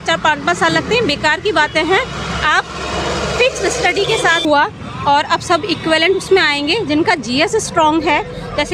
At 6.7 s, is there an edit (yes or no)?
no